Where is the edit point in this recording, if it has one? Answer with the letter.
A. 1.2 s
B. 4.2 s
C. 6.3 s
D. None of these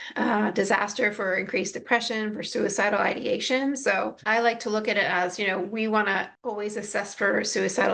C